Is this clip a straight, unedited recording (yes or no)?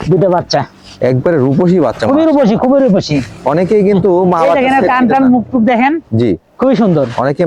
yes